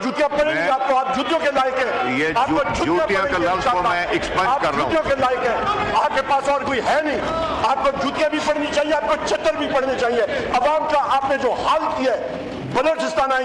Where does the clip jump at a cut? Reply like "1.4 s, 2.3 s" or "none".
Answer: none